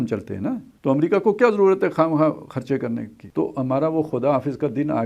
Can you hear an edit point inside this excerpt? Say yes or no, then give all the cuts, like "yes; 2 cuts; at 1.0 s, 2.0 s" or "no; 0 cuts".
yes; 1 cut; at 3.2 s